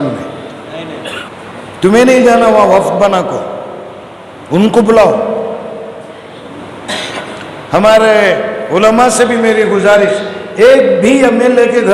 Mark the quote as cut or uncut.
cut